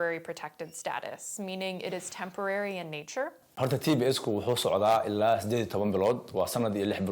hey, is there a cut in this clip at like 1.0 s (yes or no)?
no